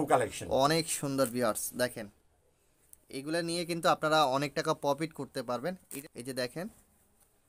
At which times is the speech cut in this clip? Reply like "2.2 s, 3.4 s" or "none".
5.9 s